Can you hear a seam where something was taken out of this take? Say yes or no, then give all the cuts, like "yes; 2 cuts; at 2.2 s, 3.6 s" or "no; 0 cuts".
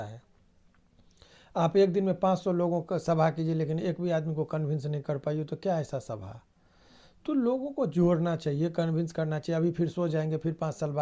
no; 0 cuts